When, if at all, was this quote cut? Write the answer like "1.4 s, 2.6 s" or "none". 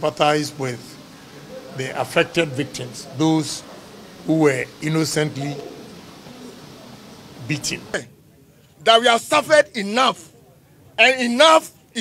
8.1 s